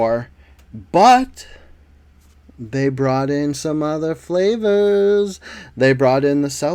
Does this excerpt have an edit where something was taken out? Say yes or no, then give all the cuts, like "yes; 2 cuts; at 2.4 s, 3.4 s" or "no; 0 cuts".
no; 0 cuts